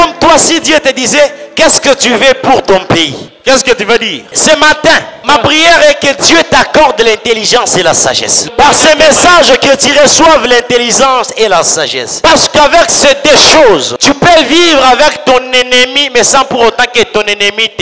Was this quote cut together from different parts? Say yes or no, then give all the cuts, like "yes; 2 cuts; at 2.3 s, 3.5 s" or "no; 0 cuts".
yes; 6 cuts; at 3.2 s, 4.2 s, 5.2 s, 8.5 s, 12.1 s, 13.9 s